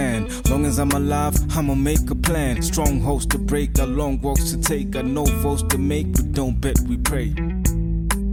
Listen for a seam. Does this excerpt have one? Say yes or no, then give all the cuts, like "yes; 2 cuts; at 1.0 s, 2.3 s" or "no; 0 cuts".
no; 0 cuts